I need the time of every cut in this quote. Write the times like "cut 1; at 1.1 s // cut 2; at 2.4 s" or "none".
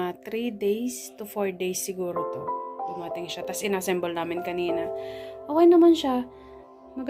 none